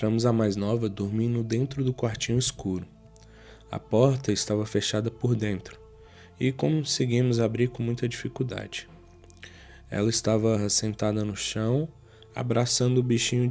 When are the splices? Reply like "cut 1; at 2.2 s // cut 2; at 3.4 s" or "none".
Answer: none